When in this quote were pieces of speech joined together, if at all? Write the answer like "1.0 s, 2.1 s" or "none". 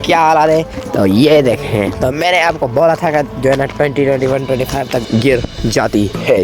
5.0 s